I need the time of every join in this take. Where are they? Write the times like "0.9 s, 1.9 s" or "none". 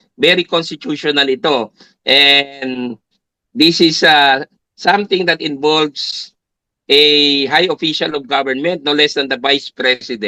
none